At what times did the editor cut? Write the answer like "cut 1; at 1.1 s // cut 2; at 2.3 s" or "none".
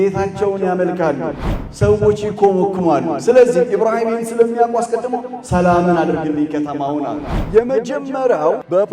cut 1; at 1.5 s // cut 2; at 7.3 s